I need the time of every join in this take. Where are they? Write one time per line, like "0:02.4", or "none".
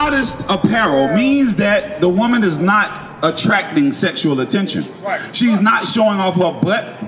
none